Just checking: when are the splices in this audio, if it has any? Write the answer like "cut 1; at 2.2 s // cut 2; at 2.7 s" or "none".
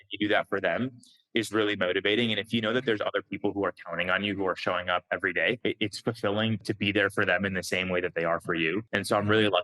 cut 1; at 5.6 s // cut 2; at 6.6 s // cut 3; at 8.9 s